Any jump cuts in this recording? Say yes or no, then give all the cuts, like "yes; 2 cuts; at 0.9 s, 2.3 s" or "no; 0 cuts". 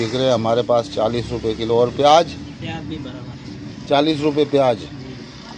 no; 0 cuts